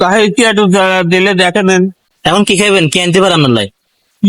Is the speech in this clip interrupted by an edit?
yes; 1 cut; at 2.1 s

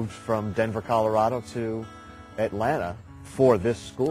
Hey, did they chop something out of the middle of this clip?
no; 0 cuts

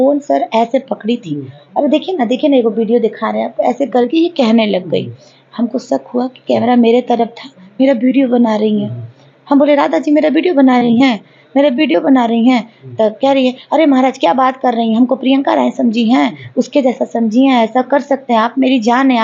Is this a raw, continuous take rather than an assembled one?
yes; 0 cuts

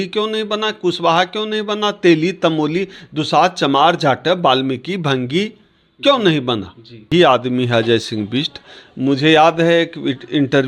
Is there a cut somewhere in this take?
yes; 1 cut; at 7.1 s

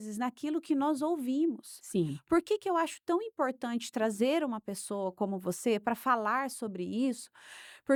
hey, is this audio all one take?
yes; 0 cuts

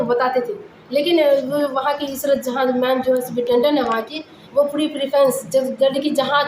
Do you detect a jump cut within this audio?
no; 0 cuts

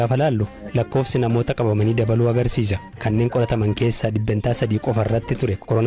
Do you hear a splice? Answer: yes; 1 cut; at 3.0 s

